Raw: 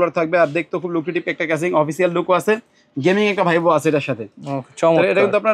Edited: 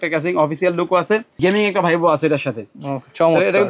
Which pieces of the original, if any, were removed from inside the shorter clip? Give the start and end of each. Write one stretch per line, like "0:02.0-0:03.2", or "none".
0:02.7-0:02.9